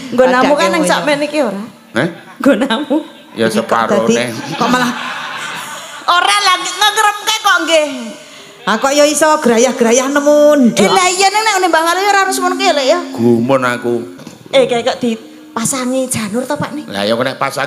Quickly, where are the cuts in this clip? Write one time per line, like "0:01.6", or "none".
0:14.2